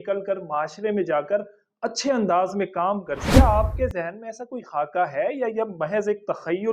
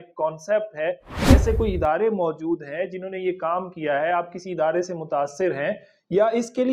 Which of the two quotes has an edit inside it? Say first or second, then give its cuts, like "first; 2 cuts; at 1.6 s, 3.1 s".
first; 1 cut; at 3.3 s